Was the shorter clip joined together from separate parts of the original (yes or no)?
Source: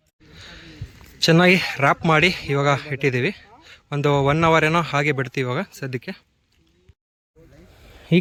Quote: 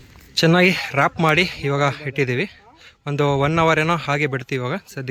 no